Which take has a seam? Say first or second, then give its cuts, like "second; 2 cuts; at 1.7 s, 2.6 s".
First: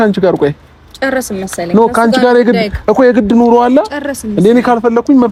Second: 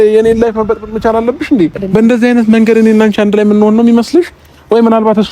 second; 1 cut; at 1.8 s